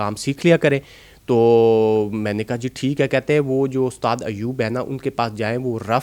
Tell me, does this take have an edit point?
no; 0 cuts

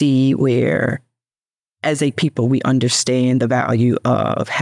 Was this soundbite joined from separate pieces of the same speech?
no; 0 cuts

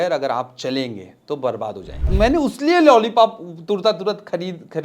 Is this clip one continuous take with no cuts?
no; 1 cut; at 2.1 s

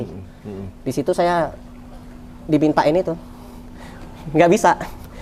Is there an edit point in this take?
no; 0 cuts

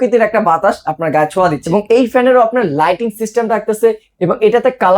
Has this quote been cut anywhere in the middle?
yes; 1 cut; at 1.6 s

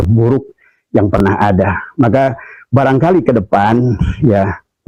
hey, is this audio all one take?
yes; 0 cuts

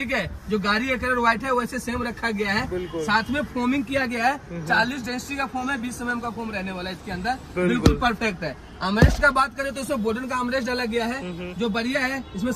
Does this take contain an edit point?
no; 0 cuts

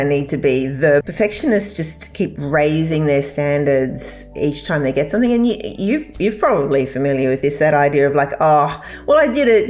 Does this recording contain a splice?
yes; 1 cut; at 1.1 s

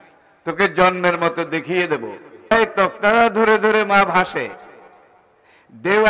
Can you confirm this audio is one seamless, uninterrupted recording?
no; 1 cut; at 2.5 s

